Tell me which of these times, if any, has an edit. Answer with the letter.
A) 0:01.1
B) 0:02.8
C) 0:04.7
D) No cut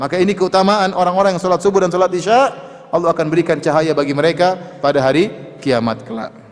D